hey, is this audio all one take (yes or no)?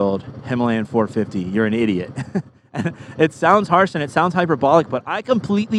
yes